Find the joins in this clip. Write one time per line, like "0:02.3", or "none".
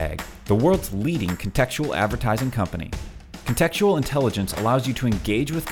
none